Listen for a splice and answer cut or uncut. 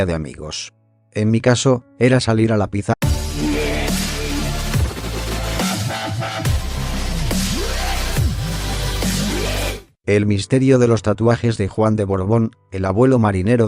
uncut